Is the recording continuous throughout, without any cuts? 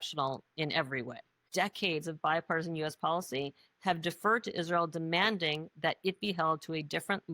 no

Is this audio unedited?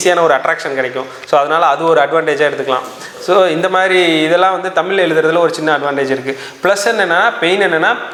yes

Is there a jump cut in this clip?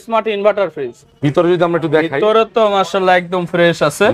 yes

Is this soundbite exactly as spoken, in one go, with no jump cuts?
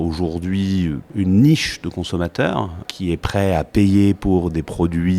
no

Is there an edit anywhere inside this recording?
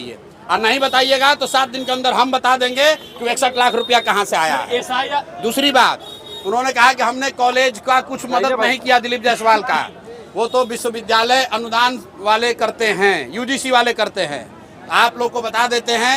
no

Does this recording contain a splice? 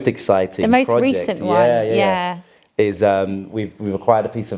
no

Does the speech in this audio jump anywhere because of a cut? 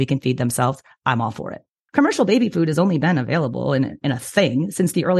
yes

